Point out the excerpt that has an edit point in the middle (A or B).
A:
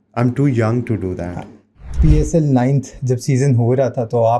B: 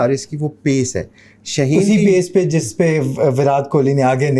A